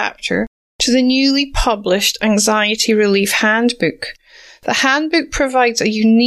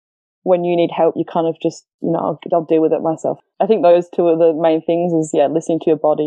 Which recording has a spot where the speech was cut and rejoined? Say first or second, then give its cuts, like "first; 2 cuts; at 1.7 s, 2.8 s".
second; 2 cuts; at 1.9 s, 3.4 s